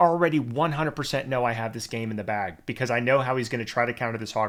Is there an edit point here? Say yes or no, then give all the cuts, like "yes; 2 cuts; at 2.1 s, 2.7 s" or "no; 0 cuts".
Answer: no; 0 cuts